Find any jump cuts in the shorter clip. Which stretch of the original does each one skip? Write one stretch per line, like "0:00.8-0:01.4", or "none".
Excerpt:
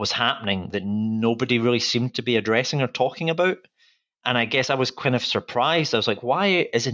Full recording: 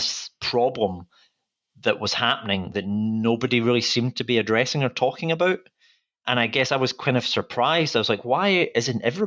none